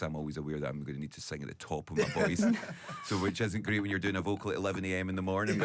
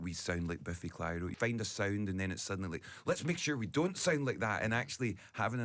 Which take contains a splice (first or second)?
second